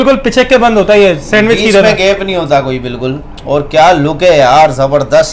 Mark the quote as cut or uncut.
uncut